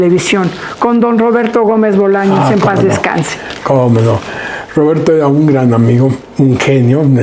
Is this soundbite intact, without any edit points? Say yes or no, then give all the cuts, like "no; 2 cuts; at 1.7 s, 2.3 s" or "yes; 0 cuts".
yes; 0 cuts